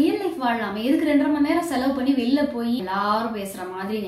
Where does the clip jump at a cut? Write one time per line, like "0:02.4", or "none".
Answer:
0:02.8